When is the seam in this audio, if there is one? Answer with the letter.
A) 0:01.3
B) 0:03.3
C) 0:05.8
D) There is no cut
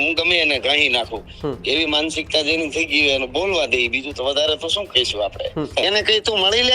C